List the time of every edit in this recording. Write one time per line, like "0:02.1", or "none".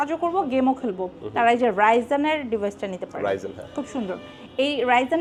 none